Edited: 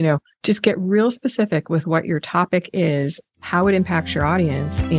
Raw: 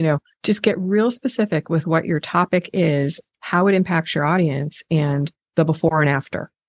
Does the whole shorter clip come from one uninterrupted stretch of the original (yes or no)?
yes